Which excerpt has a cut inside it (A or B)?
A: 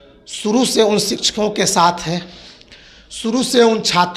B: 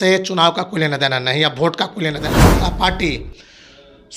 B